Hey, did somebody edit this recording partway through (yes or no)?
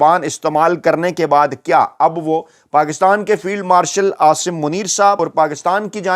yes